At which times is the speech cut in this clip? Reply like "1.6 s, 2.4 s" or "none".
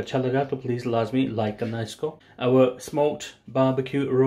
2.2 s